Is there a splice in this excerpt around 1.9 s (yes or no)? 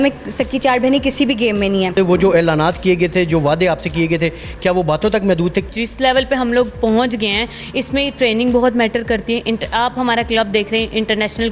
yes